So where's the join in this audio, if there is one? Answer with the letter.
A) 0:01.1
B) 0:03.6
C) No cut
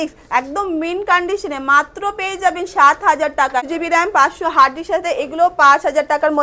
B